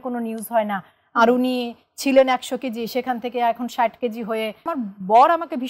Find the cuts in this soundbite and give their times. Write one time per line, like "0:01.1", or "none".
0:04.7